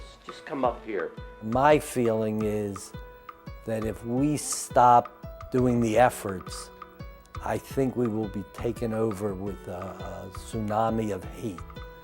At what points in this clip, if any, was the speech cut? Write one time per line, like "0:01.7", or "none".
0:01.3